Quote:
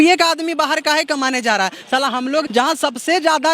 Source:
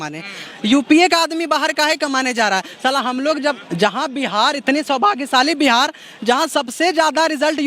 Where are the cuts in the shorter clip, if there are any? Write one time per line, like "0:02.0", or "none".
0:02.5